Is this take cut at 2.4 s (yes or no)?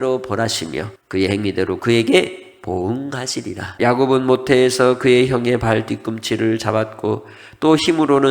no